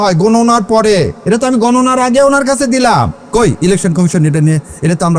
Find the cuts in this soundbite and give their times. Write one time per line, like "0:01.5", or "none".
0:01.2
0:03.2

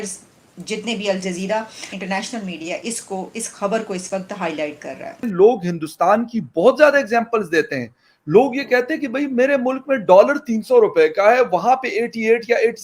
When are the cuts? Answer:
0:01.9
0:05.3

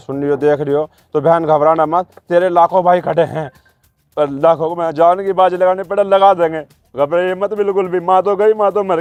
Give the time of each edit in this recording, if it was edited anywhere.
none

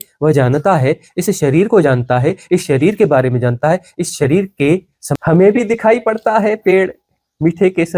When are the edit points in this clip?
0:05.2

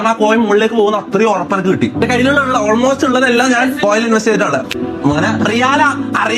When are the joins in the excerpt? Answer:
0:04.8

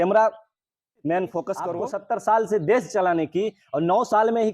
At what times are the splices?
0:01.8

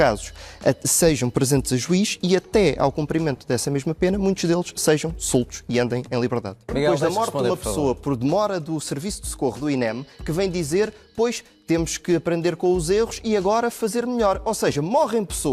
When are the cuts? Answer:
0:06.7

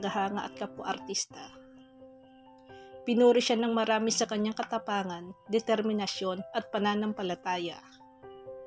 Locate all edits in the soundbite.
0:07.7

